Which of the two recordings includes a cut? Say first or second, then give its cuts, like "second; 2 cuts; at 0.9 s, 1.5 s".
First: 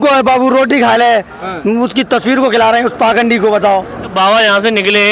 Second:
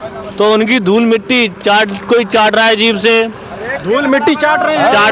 first; 1 cut; at 4.1 s